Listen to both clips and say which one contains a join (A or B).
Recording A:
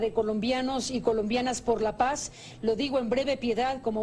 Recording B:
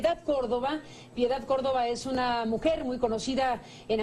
B